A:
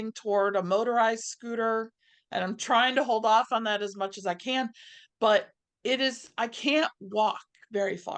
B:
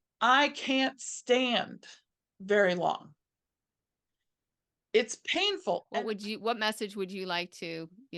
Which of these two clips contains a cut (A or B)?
B